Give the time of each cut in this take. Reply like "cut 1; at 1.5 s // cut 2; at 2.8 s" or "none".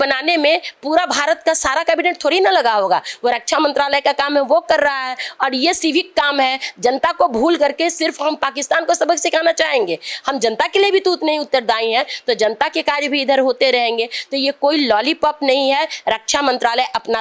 none